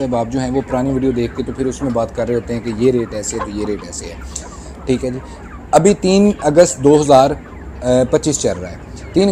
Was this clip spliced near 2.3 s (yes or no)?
no